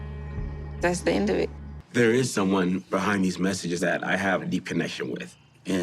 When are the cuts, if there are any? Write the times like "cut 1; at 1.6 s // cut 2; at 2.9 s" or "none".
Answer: cut 1; at 1.7 s

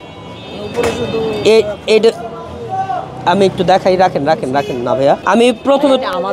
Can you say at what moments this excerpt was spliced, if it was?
cut 1; at 5.2 s

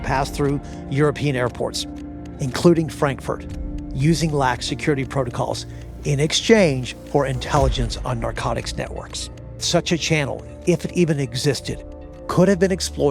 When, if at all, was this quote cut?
cut 1; at 9.6 s

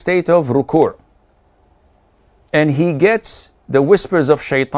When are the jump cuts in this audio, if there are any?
none

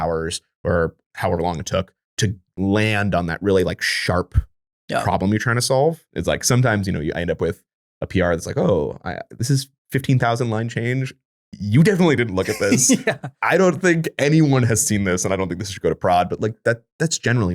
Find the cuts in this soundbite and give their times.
cut 1; at 6.1 s // cut 2; at 9.8 s

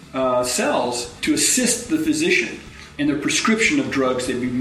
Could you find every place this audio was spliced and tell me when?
cut 1; at 1.1 s

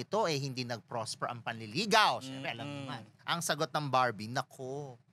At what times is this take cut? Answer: none

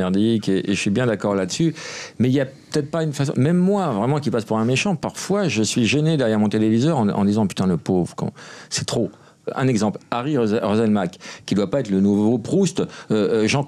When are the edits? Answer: none

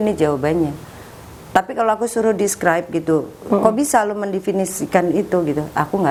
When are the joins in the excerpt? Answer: none

